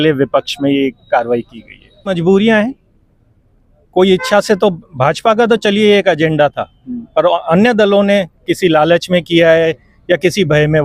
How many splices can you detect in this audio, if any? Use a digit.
1